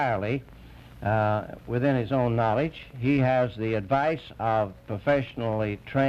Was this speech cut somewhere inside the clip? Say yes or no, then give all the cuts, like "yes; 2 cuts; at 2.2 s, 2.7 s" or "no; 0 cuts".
no; 0 cuts